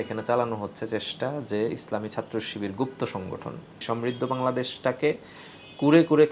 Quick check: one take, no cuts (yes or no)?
no